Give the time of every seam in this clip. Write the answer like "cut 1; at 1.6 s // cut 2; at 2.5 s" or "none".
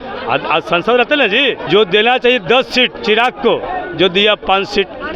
cut 1; at 1.6 s